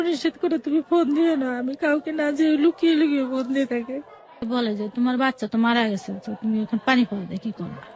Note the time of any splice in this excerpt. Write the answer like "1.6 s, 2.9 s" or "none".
4.4 s